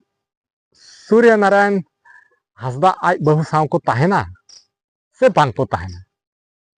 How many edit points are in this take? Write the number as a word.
zero